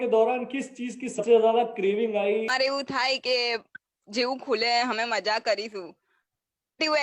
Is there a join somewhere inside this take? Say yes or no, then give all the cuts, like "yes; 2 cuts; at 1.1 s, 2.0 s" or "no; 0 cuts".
yes; 2 cuts; at 1.2 s, 2.6 s